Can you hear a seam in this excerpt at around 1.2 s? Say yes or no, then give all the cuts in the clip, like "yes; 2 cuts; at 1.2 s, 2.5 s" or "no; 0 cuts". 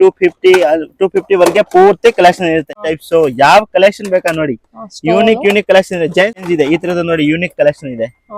no; 2 cuts; at 2.7 s, 6.3 s